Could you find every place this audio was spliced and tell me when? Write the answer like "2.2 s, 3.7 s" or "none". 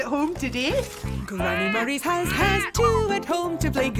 1.0 s

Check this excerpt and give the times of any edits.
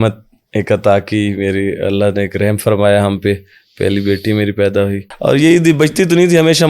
5.1 s

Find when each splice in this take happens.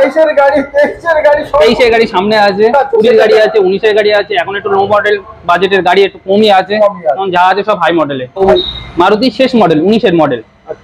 8.4 s

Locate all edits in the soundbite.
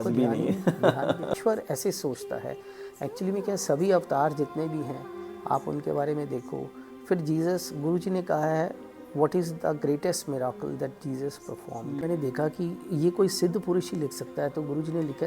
1.4 s, 12.0 s

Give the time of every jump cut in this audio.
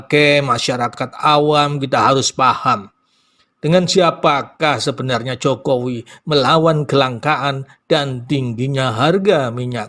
none

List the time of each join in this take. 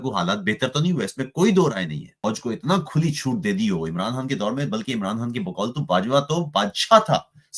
2.2 s

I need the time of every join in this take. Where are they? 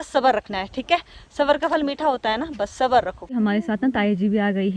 3.3 s

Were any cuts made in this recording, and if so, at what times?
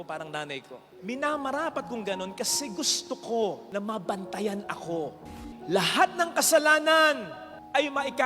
5.4 s

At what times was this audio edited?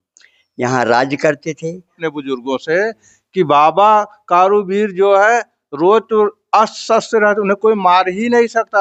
2.0 s

